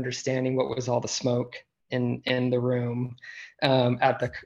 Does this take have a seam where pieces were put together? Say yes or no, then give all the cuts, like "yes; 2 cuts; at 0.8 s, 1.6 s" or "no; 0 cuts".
no; 0 cuts